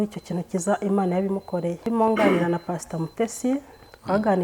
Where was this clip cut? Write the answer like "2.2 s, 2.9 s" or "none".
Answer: 1.8 s

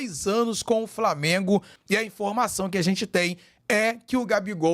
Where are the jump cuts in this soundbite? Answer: 1.7 s

